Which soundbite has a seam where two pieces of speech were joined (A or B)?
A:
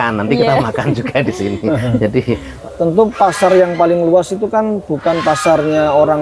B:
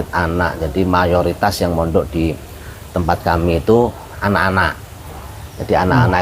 A